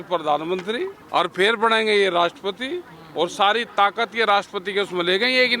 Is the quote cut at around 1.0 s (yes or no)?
yes